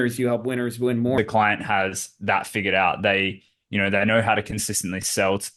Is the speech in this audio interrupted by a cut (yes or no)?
yes